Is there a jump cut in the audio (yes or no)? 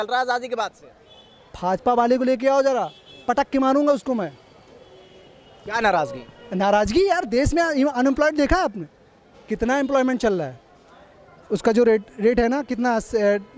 no